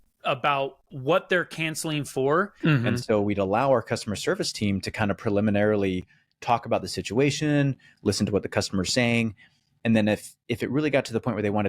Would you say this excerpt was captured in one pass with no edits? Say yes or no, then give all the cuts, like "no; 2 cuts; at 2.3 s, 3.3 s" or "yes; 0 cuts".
no; 1 cut; at 2.5 s